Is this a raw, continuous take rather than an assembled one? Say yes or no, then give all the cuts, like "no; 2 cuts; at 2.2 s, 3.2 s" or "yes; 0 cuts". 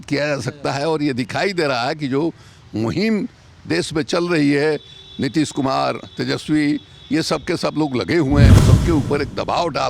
no; 1 cut; at 8.5 s